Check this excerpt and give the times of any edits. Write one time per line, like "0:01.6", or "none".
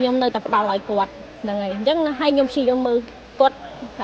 none

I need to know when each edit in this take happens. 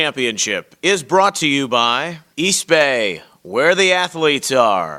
none

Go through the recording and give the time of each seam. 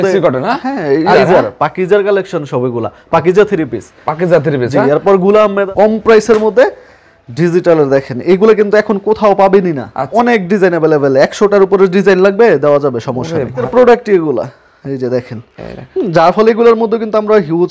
0:01.1
0:05.6
0:10.0
0:13.6

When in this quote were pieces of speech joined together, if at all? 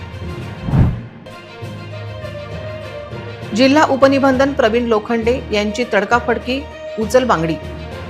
0:01.1

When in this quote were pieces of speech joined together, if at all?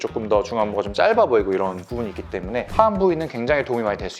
0:02.7

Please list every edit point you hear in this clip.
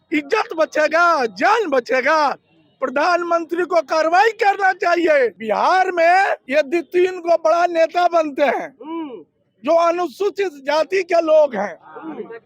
0:05.4
0:06.4

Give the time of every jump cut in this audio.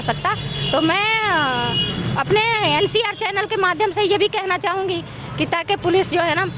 none

